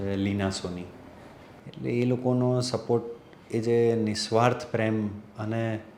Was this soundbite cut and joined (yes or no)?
no